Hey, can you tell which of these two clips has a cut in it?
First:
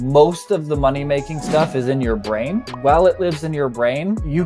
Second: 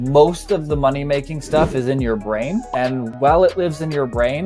first; 1 cut; at 2.7 s

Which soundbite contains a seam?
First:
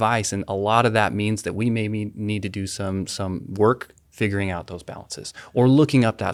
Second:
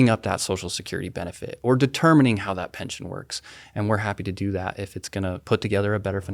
second; 1 cut; at 5.4 s

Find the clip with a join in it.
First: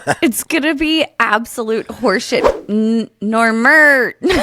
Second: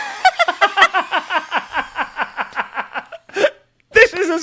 first; 1 cut; at 2.4 s

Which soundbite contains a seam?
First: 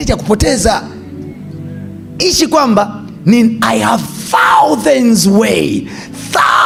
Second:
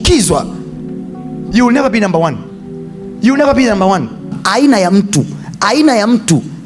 second; 1 cut; at 4.3 s

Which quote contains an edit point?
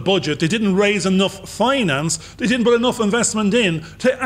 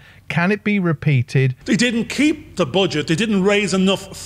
second; 1 cut; at 1.6 s

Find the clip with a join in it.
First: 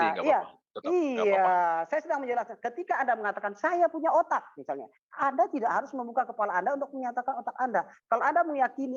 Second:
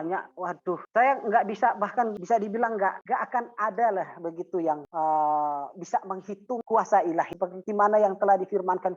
second; 6 cuts; at 0.8 s, 2.2 s, 3.0 s, 4.9 s, 6.6 s, 7.3 s

